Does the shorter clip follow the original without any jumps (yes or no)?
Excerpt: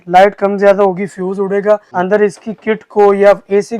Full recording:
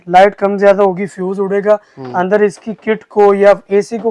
no